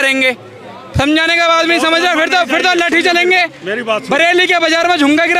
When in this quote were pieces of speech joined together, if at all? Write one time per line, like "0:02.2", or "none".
none